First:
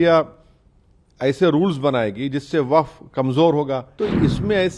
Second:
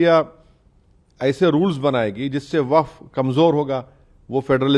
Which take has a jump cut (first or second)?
first